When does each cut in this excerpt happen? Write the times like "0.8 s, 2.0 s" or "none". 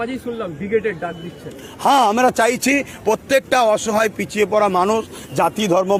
none